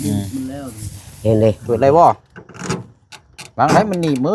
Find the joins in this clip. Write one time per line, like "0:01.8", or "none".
0:01.6